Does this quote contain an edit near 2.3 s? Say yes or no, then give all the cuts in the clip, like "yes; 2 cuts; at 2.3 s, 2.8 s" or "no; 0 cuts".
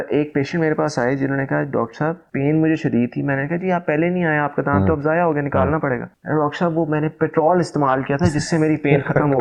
no; 0 cuts